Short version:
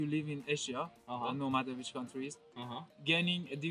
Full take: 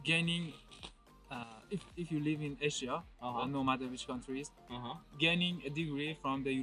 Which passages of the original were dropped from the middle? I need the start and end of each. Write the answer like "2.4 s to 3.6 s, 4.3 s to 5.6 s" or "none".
none